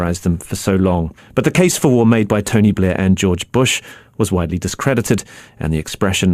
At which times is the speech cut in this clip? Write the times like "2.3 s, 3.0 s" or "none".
1.7 s